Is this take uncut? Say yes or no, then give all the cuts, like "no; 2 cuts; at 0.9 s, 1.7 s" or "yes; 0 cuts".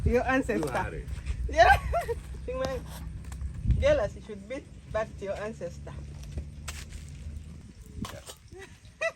no; 1 cut; at 7.6 s